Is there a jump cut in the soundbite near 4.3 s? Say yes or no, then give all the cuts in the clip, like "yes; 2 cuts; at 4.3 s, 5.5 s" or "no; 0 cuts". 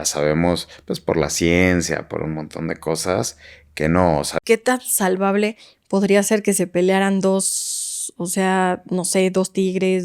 yes; 1 cut; at 4.3 s